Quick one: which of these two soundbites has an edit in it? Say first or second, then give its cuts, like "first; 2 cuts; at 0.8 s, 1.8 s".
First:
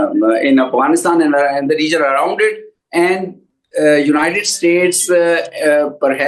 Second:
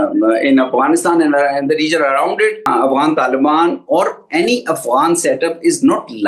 second; 1 cut; at 2.7 s